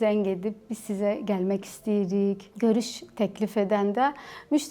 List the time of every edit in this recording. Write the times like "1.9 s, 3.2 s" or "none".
2.5 s